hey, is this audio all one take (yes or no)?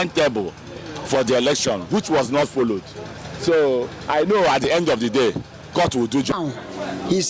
no